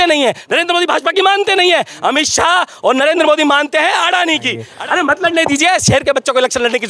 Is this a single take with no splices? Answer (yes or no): no